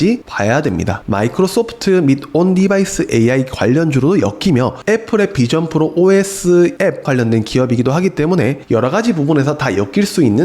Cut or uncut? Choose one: cut